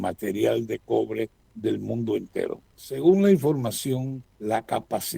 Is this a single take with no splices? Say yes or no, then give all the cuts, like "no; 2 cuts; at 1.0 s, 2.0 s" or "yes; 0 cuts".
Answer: no; 3 cuts; at 1.4 s, 2.7 s, 4.2 s